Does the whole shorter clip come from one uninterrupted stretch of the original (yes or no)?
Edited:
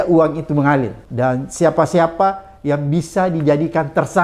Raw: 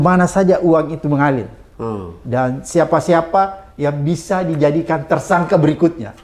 no